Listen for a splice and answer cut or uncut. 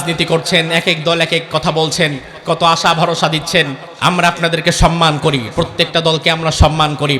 cut